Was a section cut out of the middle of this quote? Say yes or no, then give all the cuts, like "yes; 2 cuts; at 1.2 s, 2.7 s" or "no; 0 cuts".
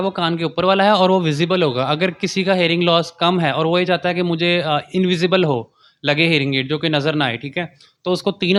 no; 0 cuts